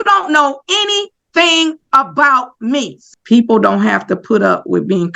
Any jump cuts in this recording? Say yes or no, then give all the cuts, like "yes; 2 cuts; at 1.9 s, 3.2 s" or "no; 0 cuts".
yes; 1 cut; at 3.0 s